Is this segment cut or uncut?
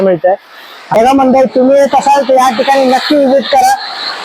cut